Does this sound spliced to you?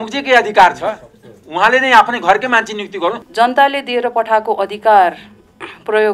yes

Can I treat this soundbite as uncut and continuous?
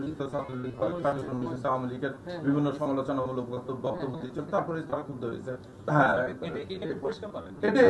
no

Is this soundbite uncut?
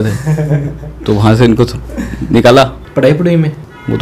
no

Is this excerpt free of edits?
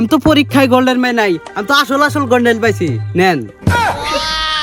yes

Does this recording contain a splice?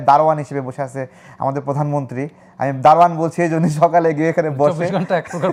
no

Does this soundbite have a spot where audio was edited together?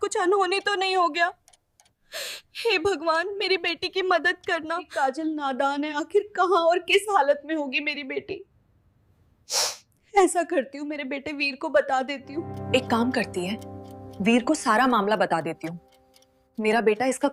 no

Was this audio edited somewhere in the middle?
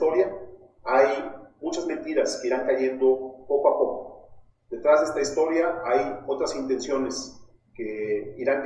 no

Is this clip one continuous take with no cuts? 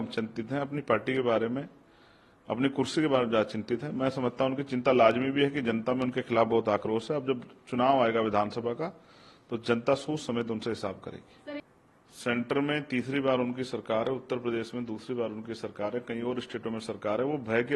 no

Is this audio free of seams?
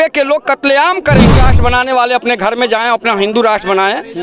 no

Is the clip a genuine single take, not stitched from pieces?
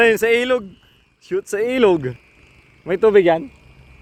yes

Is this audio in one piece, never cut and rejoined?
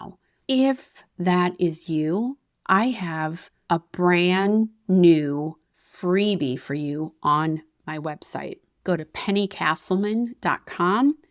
yes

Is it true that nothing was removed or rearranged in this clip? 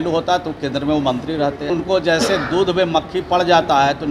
no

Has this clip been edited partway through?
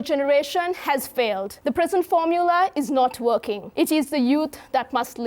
yes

